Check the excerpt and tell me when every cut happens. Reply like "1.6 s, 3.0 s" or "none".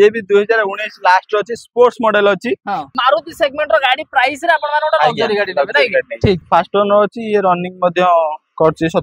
2.9 s, 6.4 s